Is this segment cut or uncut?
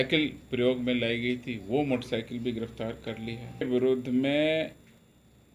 cut